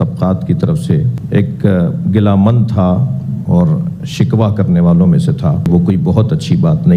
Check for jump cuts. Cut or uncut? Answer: cut